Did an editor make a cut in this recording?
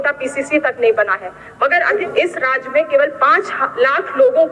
yes; 1 cut; at 2.0 s

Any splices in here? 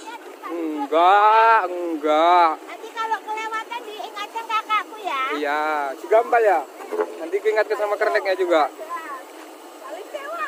no; 0 cuts

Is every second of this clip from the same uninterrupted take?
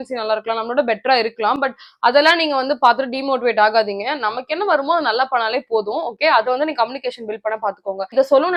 yes; 0 cuts

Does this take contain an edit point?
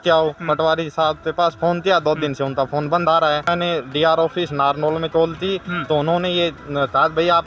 yes; 1 cut; at 3.4 s

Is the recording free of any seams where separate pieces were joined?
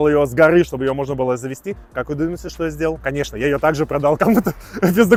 yes; 0 cuts

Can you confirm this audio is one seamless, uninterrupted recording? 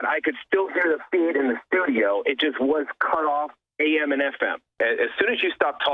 no; 1 cut; at 4.7 s

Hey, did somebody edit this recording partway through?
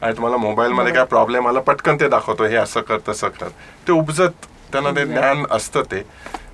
no; 0 cuts

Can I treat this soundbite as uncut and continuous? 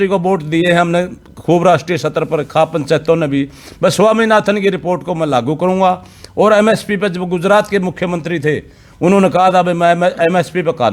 yes; 0 cuts

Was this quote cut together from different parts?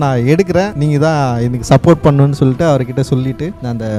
no; 0 cuts

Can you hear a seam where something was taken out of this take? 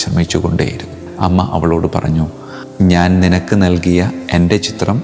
yes; 1 cut; at 1.0 s

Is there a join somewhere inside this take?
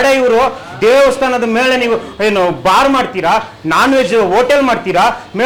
no; 0 cuts

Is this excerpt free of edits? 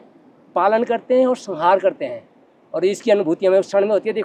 yes; 0 cuts

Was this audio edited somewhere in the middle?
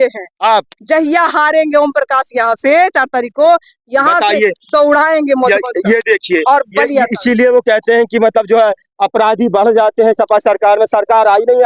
no; 0 cuts

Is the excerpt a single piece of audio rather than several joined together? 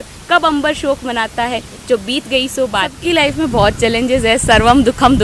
no; 1 cut; at 3.0 s

